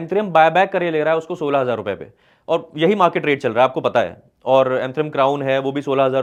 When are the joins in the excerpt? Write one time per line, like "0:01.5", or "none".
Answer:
none

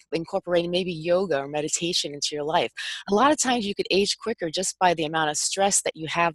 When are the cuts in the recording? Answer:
none

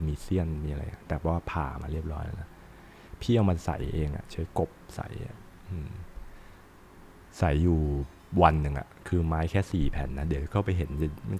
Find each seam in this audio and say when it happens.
none

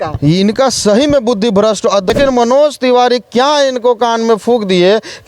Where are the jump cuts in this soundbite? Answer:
0:02.1

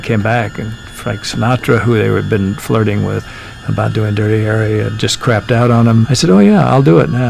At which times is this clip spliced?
0:03.3
0:04.9
0:06.1

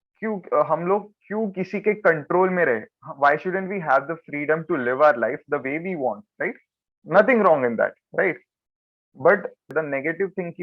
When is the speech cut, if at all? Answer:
0:09.7

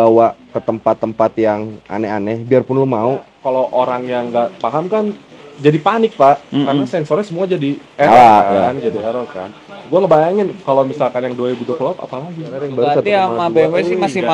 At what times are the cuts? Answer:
0:03.3
0:12.7

